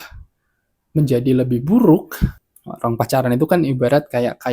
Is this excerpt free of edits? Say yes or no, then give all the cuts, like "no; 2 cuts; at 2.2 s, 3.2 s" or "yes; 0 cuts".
no; 1 cut; at 2.3 s